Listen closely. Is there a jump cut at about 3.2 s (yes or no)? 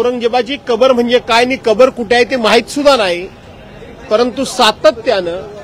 no